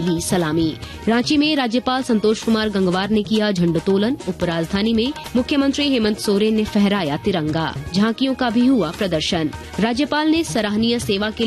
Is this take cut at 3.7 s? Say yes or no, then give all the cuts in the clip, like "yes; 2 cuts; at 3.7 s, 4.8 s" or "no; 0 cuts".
no; 4 cuts; at 0.9 s, 5.2 s, 7.8 s, 9.6 s